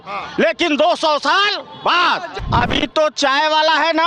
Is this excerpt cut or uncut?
cut